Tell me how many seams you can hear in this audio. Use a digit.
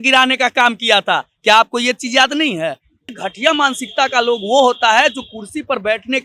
1